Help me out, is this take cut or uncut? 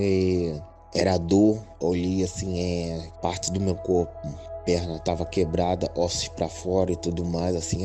cut